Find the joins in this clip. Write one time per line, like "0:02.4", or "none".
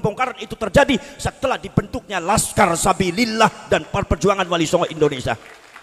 none